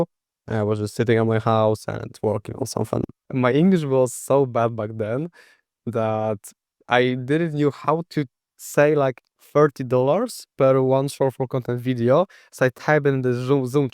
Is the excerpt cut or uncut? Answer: cut